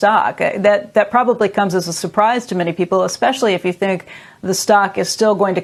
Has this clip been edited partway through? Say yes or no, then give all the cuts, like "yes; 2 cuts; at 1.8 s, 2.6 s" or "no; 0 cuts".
no; 0 cuts